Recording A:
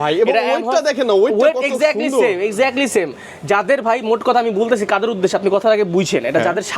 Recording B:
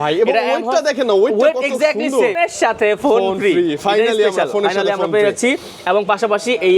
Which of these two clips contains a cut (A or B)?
B